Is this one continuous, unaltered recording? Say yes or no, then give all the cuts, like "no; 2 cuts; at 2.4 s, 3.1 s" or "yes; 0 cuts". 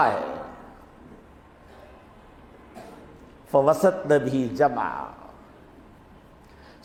yes; 0 cuts